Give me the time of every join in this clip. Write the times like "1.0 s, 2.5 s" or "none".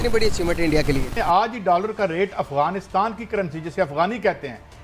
1.2 s